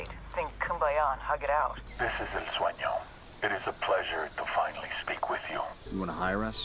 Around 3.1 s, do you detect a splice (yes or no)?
no